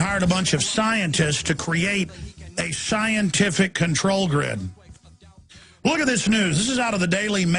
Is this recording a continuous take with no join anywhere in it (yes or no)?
yes